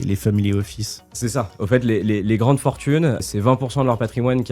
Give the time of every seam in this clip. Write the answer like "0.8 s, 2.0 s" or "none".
3.2 s